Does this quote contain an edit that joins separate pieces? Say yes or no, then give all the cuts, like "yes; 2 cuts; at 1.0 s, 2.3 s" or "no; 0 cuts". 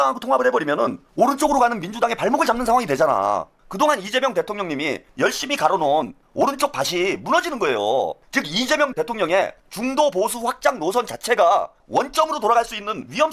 yes; 4 cuts; at 1.0 s, 3.6 s, 5.0 s, 8.2 s